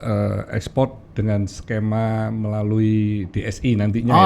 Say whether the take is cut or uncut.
uncut